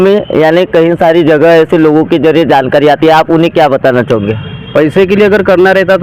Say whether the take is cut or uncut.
uncut